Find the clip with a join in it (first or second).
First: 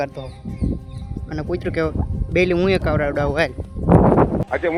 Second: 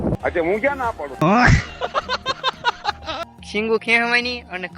second